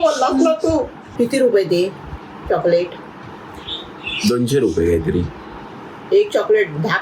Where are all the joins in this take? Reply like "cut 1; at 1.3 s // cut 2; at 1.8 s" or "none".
cut 1; at 1.0 s